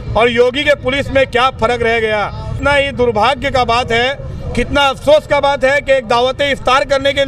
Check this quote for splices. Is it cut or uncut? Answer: cut